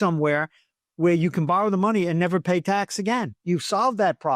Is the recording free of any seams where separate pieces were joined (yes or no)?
no